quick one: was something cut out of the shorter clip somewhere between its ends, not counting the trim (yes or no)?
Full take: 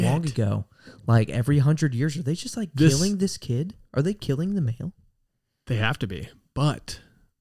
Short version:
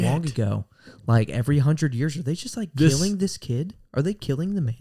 no